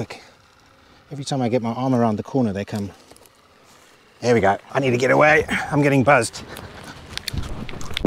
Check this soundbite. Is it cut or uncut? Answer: cut